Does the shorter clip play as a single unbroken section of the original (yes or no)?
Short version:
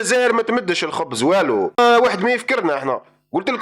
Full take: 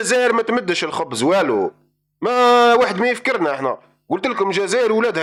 no